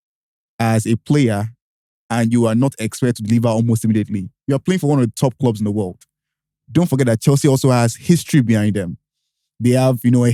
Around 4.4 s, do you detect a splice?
no; 0 cuts

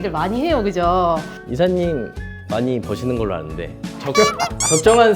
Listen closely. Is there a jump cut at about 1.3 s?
yes; 1 cut; at 1.3 s

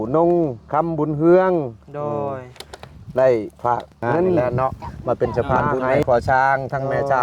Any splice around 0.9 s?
no; 1 cut; at 4.4 s

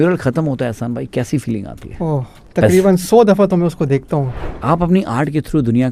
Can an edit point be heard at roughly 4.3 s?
yes; 1 cut; at 4.3 s

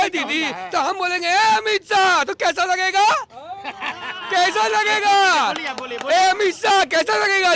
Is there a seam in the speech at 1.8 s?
no; 0 cuts

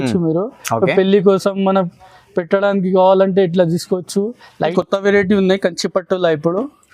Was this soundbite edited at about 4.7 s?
yes; 1 cut; at 4.7 s

